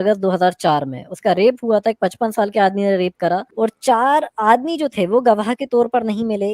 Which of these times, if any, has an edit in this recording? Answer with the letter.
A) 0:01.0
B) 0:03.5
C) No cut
B